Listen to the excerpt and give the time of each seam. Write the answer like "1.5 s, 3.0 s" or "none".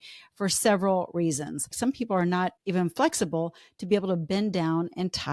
1.8 s, 2.6 s

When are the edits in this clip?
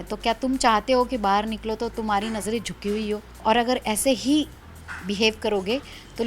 3.3 s

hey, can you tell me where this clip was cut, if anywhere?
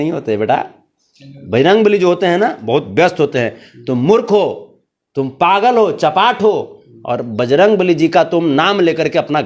none

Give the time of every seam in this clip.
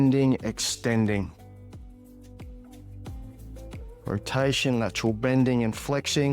1.9 s, 4.0 s

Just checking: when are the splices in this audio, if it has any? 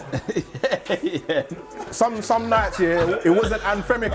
3.1 s

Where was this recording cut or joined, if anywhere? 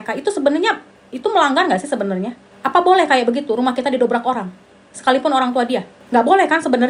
none

